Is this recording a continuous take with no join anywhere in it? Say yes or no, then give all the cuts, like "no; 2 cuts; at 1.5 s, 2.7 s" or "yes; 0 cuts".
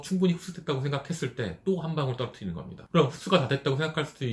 yes; 0 cuts